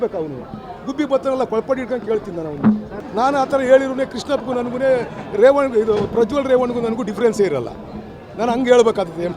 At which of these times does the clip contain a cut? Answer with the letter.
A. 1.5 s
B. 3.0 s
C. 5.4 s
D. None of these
B